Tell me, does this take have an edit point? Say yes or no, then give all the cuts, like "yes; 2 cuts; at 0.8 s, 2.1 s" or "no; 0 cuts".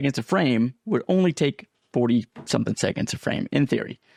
no; 0 cuts